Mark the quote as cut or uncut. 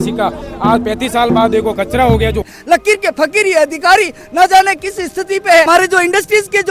cut